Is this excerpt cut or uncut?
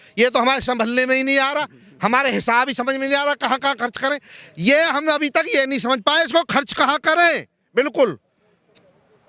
uncut